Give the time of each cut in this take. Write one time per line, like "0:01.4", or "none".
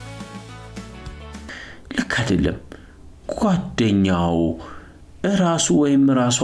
0:01.3